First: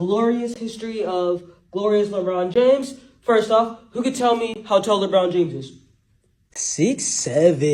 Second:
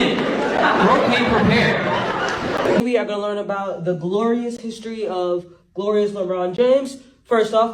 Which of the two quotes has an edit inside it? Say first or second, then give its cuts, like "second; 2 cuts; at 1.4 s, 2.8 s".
second; 1 cut; at 2.8 s